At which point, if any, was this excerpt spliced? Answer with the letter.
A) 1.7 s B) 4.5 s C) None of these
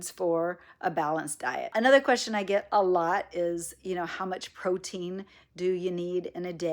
A